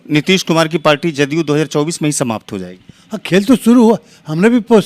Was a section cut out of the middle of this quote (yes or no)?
no